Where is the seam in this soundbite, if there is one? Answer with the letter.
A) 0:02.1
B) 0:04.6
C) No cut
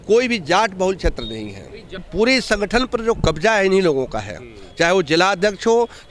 A